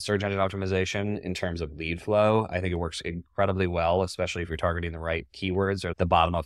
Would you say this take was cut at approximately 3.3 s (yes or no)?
no